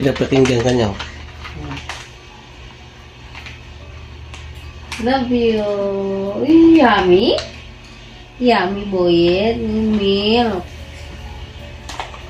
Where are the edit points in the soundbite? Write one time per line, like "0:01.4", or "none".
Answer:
none